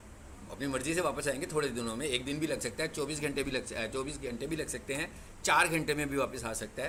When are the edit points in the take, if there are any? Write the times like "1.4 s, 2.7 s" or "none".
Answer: none